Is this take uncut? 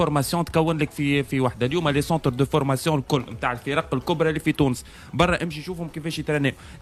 yes; 0 cuts

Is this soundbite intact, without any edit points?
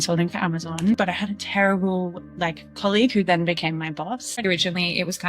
no; 3 cuts; at 0.9 s, 2.2 s, 4.4 s

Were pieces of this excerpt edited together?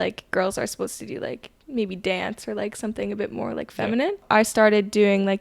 yes; 1 cut; at 4.2 s

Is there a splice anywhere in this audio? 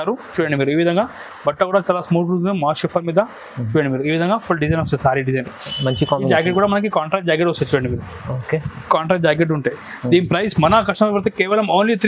no; 0 cuts

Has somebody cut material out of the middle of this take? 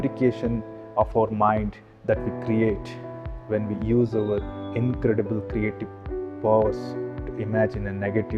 no; 0 cuts

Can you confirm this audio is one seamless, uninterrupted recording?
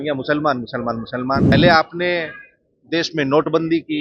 no; 1 cut; at 1.5 s

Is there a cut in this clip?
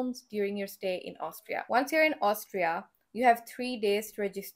yes; 1 cut; at 1.7 s

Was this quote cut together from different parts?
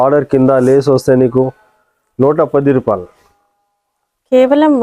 no; 0 cuts

